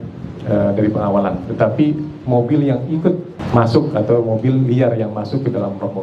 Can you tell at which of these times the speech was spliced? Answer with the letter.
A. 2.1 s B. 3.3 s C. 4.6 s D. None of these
B